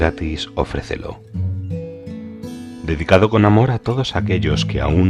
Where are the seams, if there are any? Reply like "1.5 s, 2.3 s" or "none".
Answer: 1.2 s, 2.8 s